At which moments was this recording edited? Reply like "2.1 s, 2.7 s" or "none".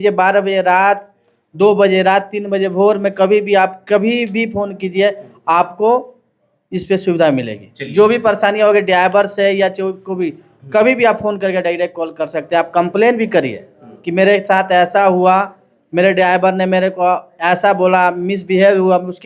none